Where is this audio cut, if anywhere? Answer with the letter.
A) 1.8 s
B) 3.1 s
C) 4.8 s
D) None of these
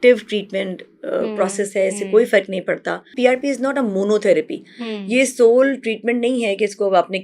B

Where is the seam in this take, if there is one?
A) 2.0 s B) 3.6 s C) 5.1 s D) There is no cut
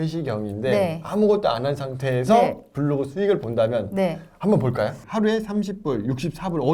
C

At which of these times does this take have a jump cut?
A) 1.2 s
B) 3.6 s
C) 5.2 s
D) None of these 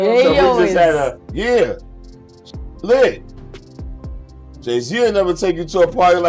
A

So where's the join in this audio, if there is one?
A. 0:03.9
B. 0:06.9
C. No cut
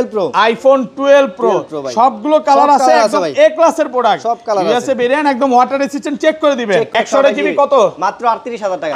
B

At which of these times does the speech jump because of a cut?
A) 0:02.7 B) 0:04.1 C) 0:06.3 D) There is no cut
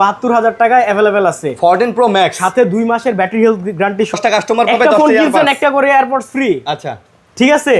B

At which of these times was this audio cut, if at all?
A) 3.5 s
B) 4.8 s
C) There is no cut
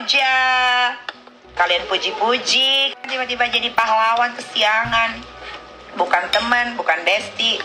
A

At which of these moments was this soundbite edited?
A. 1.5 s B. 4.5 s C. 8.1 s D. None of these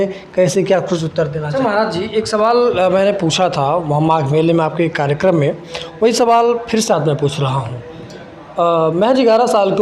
A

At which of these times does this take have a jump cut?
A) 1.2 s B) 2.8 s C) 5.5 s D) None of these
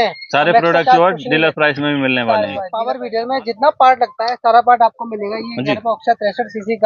B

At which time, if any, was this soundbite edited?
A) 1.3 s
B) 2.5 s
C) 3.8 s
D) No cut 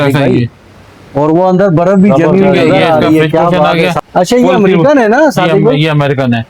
C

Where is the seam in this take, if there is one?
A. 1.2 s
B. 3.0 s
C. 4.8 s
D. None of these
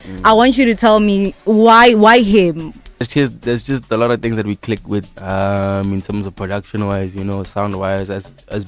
B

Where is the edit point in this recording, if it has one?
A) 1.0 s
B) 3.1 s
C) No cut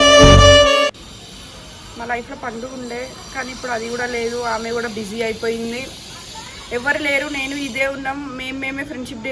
C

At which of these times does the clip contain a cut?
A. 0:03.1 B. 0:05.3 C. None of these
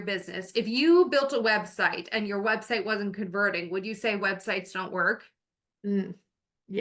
C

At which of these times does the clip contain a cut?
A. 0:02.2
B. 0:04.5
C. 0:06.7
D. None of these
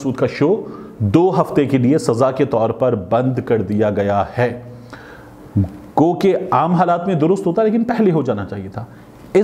D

